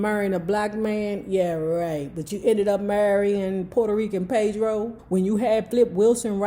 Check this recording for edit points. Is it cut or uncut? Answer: cut